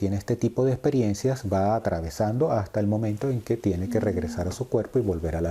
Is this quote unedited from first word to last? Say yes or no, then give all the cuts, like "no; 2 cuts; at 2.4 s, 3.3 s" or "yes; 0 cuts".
yes; 0 cuts